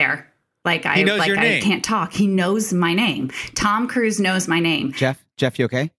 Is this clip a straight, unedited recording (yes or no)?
no